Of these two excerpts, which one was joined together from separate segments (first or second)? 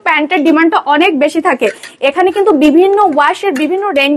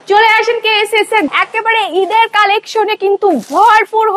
second